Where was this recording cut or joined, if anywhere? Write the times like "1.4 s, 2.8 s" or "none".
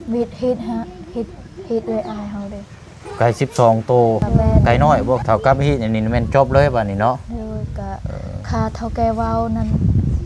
5.2 s